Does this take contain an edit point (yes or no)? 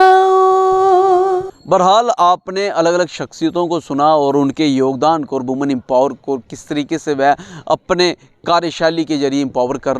no